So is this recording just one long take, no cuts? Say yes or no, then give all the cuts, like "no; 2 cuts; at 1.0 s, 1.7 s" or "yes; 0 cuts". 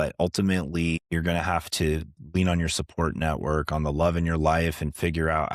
no; 1 cut; at 1.0 s